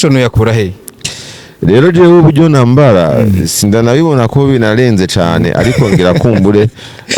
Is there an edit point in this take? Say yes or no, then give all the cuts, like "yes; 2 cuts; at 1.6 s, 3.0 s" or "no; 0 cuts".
no; 0 cuts